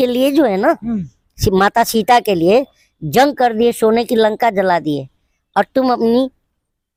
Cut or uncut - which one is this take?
uncut